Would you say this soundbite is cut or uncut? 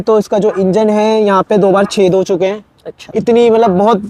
uncut